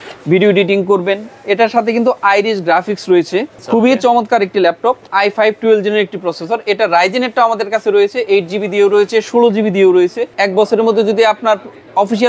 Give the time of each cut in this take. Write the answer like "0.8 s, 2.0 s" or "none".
3.6 s, 5.1 s, 10.3 s